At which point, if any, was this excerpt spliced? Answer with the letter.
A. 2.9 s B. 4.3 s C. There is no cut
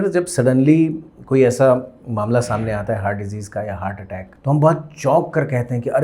B